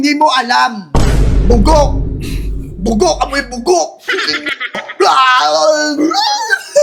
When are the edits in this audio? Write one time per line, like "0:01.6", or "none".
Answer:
none